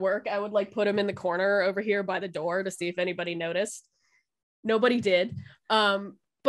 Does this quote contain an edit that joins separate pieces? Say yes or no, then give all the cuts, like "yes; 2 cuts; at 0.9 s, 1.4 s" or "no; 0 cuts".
no; 0 cuts